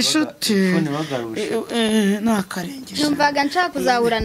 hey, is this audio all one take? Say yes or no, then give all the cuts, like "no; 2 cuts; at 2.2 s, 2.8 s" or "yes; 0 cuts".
yes; 0 cuts